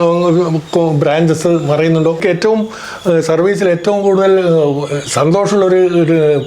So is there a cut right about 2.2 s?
yes; 1 cut; at 2.2 s

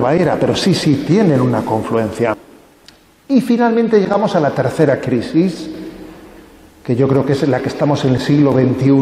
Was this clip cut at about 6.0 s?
no; 1 cut; at 2.4 s

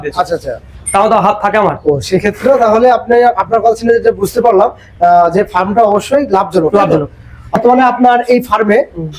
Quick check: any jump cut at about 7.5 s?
yes; 1 cut; at 7.5 s

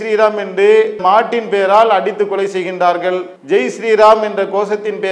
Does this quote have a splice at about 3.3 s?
no; 1 cut; at 0.9 s

